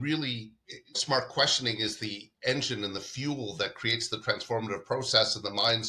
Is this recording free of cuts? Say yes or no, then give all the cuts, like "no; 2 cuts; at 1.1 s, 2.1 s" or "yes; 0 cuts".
no; 1 cut; at 1.0 s